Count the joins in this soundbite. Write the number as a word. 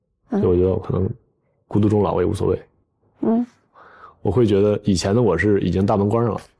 zero